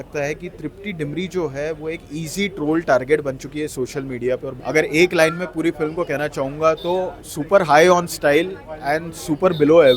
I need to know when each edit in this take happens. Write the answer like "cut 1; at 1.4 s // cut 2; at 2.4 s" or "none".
cut 1; at 4.5 s